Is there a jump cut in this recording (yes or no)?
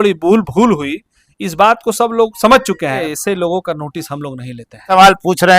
yes